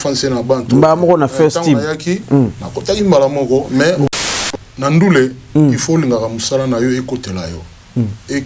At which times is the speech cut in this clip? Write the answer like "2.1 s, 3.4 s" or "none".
4.1 s